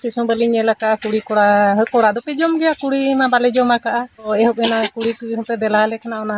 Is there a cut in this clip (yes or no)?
no